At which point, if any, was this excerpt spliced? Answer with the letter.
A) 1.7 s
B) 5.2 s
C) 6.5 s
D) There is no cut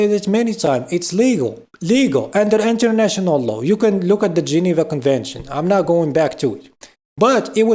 A